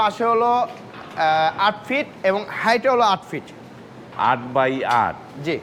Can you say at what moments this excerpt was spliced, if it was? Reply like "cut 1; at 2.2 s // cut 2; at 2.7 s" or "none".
none